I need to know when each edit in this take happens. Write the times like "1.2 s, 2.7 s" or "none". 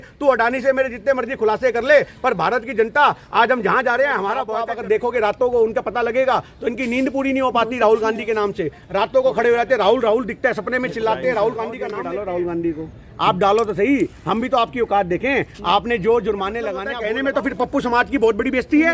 4.5 s, 11.9 s, 16.9 s